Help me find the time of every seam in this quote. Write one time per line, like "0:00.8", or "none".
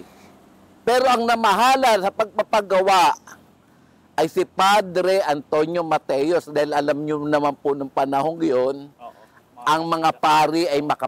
none